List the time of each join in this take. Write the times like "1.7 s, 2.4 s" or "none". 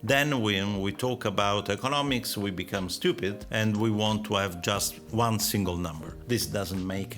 6.1 s